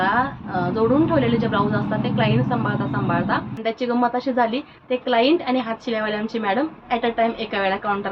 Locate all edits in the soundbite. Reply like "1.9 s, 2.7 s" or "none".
3.5 s